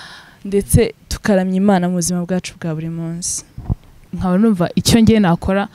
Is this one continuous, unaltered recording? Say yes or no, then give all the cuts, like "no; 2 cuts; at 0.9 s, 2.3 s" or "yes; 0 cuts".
no; 1 cut; at 4.1 s